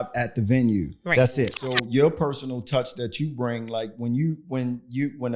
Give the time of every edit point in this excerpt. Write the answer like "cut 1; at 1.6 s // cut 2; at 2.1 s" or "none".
cut 1; at 1.6 s